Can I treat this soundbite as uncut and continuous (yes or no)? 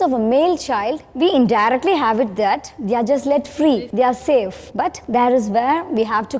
no